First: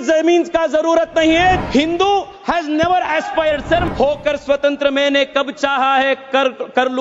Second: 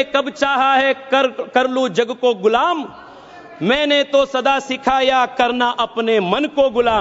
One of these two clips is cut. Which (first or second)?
first